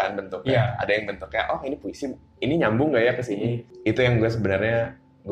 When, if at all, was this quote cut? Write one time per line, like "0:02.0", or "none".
0:03.7